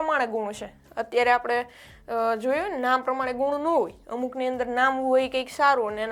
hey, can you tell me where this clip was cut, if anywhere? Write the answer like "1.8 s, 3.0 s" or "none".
none